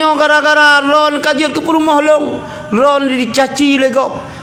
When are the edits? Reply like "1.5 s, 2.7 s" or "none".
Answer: none